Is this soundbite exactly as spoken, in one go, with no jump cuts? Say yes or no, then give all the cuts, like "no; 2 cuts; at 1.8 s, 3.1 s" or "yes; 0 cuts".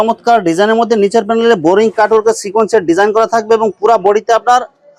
yes; 0 cuts